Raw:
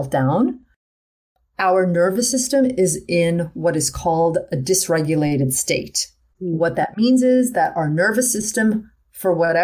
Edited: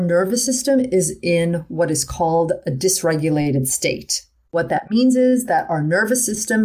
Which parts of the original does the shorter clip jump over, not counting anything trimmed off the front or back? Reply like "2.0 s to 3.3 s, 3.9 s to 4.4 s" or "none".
6.4 s to 6.6 s